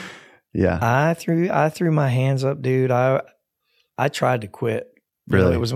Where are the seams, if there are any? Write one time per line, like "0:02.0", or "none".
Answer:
none